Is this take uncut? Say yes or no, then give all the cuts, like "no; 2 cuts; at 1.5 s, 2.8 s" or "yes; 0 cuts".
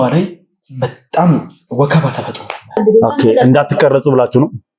no; 1 cut; at 2.8 s